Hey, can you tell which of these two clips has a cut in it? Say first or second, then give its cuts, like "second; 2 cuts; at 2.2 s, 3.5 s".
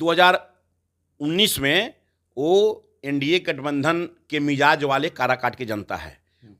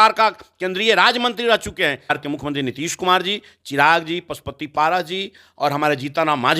second; 1 cut; at 2.2 s